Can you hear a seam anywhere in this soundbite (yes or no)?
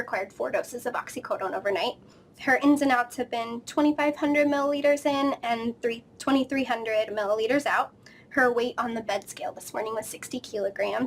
yes